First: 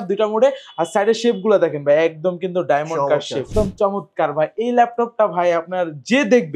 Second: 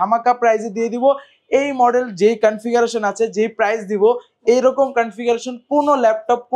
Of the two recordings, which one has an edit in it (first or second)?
first